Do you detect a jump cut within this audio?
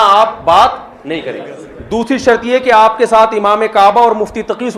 no; 0 cuts

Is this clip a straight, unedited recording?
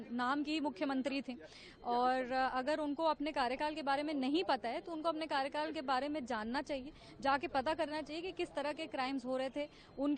yes; 0 cuts

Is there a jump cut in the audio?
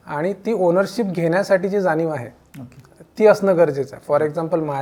no; 0 cuts

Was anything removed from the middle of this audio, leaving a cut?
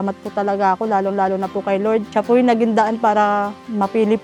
no; 0 cuts

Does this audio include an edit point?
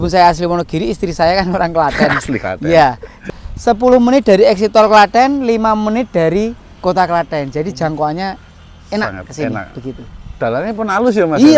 yes; 1 cut; at 3.2 s

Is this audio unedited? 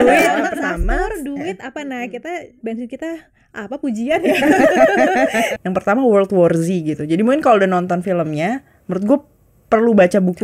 no; 2 cuts; at 2.6 s, 5.5 s

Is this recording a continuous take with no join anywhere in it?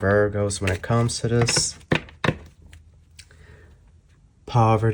yes; 0 cuts

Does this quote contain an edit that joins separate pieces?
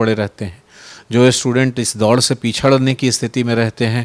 no; 0 cuts

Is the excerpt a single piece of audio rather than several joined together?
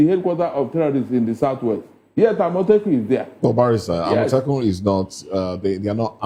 yes; 0 cuts

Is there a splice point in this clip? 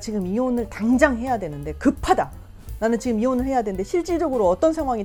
no; 0 cuts

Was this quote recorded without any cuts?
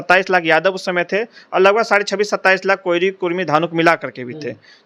yes; 0 cuts

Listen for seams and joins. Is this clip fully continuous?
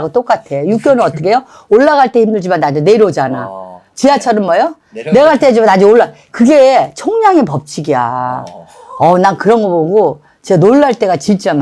yes; 0 cuts

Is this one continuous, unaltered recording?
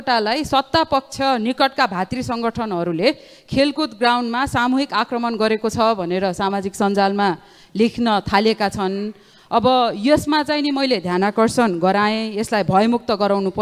yes; 0 cuts

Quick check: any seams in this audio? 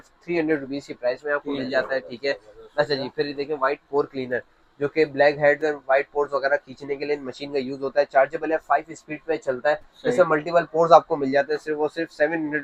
no; 0 cuts

